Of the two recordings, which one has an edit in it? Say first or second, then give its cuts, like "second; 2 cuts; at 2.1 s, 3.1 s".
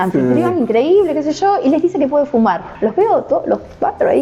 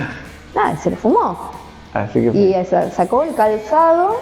first; 1 cut; at 2.7 s